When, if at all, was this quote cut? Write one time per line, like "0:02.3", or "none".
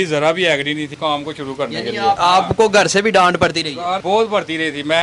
0:00.9
0:02.2
0:04.0

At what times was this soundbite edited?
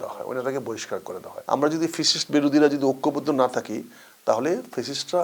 0:01.3

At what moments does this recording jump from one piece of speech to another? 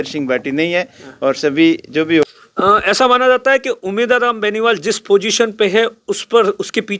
0:02.2

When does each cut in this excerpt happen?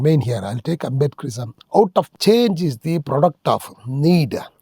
0:02.1

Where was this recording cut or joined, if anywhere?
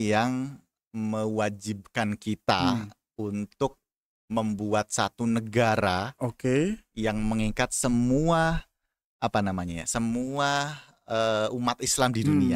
none

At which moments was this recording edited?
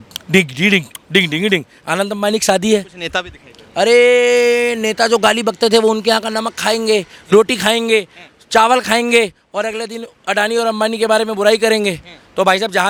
none

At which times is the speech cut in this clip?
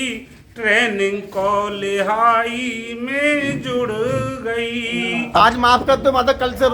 0:05.3

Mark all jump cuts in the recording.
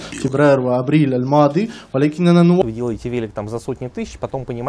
0:02.6

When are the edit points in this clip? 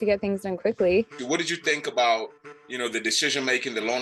0:01.2

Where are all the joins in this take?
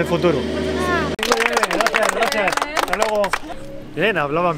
0:01.1

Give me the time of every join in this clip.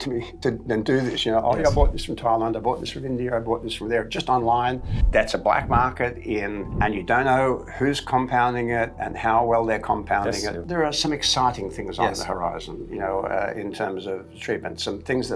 0:05.0
0:06.6
0:10.6

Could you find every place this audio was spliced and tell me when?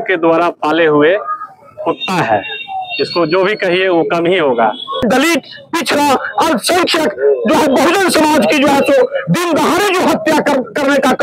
0:05.0

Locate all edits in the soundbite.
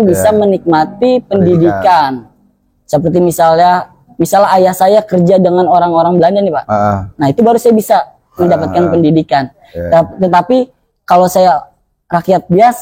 none

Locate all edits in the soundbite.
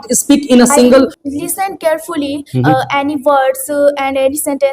0:01.2

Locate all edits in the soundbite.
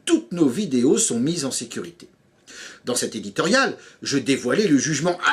0:03.3

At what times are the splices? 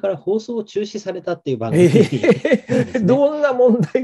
none

